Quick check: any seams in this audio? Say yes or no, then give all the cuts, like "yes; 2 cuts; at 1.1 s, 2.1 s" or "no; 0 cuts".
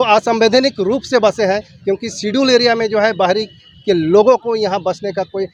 no; 0 cuts